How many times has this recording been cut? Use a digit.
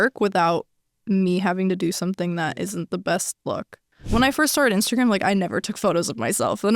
1